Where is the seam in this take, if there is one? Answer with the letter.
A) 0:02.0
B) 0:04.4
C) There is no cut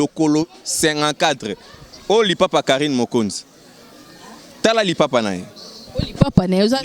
C